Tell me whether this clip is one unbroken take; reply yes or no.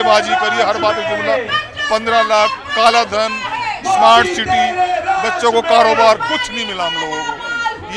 yes